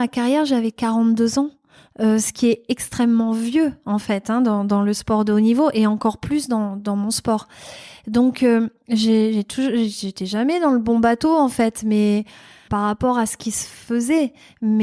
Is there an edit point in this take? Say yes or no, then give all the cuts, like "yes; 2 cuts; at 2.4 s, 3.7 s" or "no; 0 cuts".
yes; 1 cut; at 12.6 s